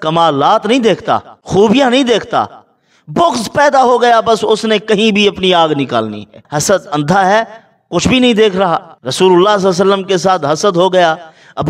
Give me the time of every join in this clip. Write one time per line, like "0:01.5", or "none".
0:01.3
0:06.3
0:09.0